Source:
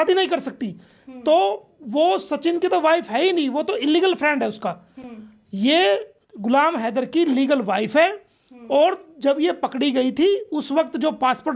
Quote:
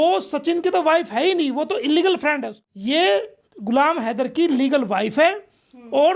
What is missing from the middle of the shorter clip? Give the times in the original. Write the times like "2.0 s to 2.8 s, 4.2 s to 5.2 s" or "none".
4.5 s to 5.3 s